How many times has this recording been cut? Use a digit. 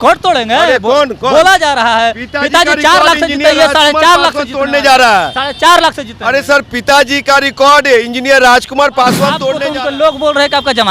1